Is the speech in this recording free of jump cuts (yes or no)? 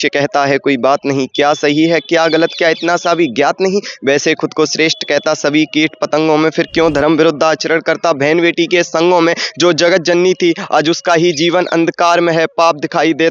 yes